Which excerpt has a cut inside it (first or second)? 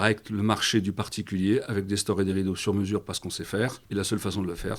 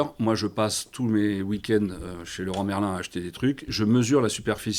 first